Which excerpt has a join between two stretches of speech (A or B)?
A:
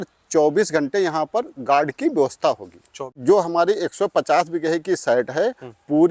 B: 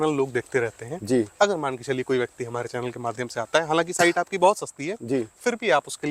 A